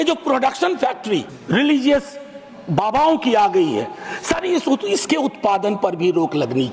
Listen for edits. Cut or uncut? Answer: cut